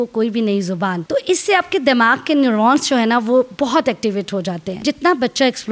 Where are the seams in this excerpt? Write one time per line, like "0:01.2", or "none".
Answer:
0:01.0
0:04.8